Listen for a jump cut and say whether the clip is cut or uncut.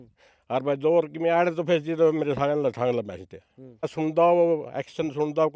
cut